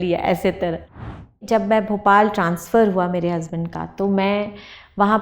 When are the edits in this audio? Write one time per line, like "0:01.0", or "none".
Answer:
0:01.4